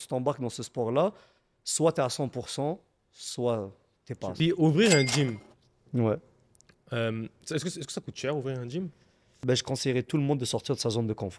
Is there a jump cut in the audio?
yes; 2 cuts; at 4.2 s, 9.3 s

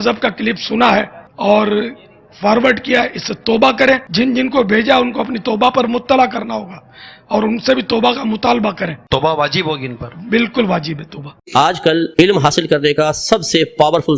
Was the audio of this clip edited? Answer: yes; 1 cut; at 11.4 s

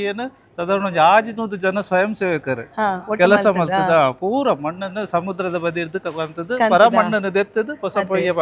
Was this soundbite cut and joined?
no; 0 cuts

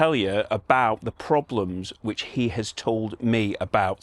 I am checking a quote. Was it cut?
no; 0 cuts

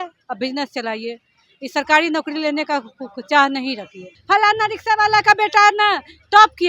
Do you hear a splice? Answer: yes; 1 cut; at 4.1 s

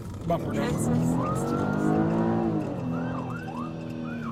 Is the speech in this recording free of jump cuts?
yes; 0 cuts

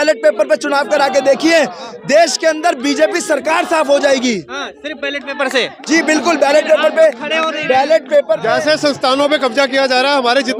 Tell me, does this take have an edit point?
no; 0 cuts

